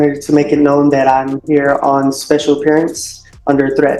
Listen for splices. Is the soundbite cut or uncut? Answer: uncut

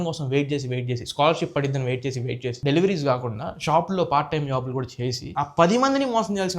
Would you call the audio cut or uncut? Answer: cut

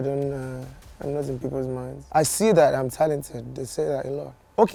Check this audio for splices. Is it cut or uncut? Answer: uncut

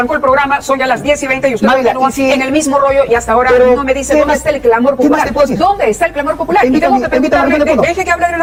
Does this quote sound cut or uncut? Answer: uncut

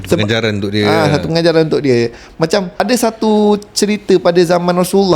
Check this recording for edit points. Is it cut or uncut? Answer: cut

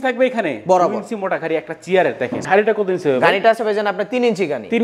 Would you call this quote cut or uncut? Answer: cut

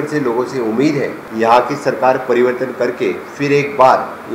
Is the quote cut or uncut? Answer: cut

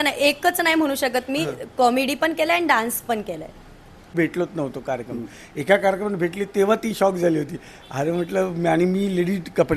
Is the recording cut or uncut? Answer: cut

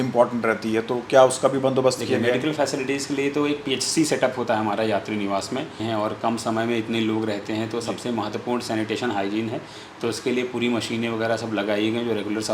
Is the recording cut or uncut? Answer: cut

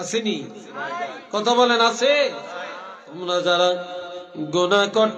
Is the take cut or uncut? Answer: cut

